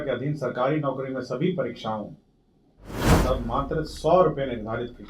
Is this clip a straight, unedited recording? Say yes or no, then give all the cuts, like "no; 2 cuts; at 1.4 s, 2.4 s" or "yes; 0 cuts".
no; 1 cut; at 3.1 s